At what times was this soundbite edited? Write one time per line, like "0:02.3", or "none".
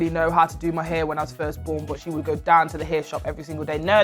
0:02.0